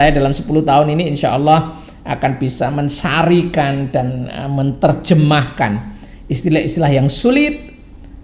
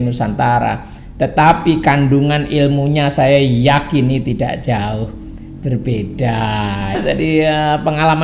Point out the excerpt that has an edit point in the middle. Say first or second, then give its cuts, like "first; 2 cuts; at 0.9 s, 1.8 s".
second; 1 cut; at 7.0 s